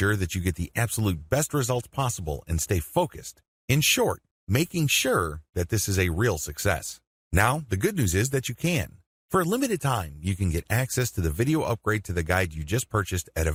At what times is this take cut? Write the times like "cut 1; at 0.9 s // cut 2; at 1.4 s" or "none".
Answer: none